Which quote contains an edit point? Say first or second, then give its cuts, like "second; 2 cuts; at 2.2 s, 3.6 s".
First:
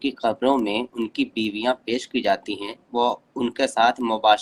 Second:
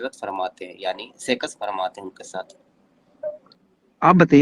second; 1 cut; at 3.5 s